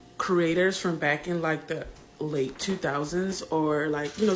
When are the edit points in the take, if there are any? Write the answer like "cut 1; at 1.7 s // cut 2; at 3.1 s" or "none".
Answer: none

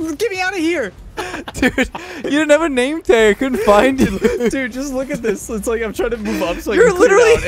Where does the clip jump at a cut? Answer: cut 1; at 1.0 s

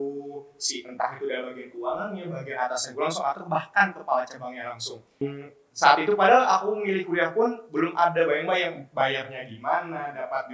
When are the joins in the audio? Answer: cut 1; at 5.1 s

